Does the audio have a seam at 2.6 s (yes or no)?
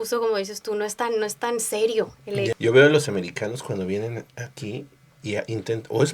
yes